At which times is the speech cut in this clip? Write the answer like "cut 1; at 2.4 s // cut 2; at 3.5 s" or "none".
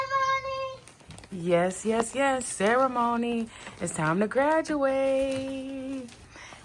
none